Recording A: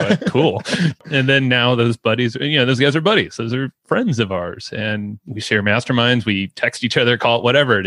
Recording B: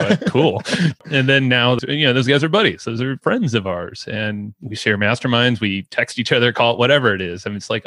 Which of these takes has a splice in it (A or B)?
B